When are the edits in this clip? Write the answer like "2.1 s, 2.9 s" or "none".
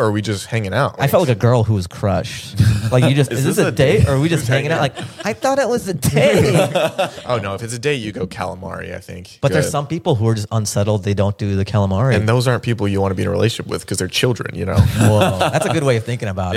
1.0 s, 3.3 s, 7.2 s, 9.4 s